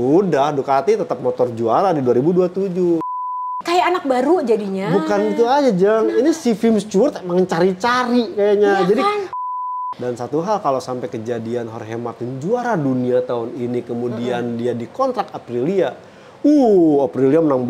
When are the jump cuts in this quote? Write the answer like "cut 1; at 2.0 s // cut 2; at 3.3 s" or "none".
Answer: cut 1; at 3.5 s // cut 2; at 9.4 s